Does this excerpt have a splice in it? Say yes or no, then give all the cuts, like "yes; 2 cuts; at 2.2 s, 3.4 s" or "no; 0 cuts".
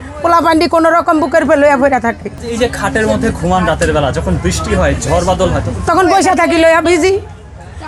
no; 0 cuts